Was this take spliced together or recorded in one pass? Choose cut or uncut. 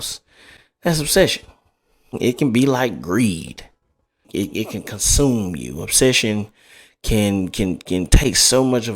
cut